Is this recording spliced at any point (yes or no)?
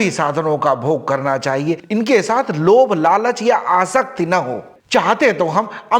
yes